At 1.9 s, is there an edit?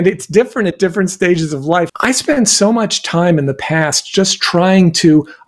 yes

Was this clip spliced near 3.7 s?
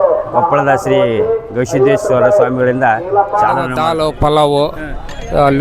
yes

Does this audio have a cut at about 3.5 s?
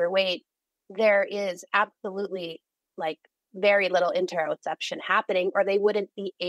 yes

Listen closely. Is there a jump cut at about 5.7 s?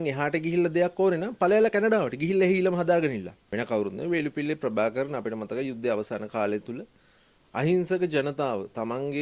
no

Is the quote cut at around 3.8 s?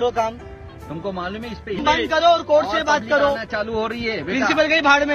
no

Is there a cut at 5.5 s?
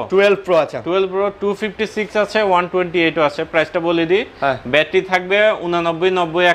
no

